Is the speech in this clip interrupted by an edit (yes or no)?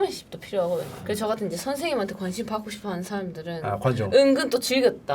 yes